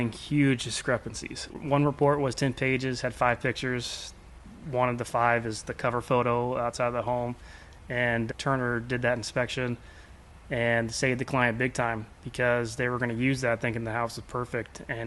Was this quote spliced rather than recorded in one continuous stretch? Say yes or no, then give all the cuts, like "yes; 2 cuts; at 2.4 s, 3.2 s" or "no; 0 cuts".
yes; 1 cut; at 1.6 s